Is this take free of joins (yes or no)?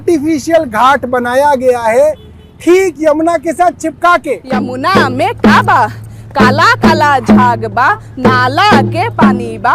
no